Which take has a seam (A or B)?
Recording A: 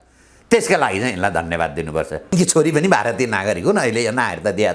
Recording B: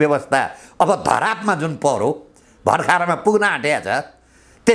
A